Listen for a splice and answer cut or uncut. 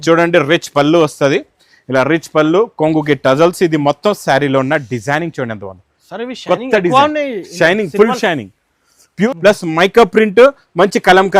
cut